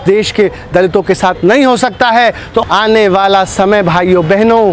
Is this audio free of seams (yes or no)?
no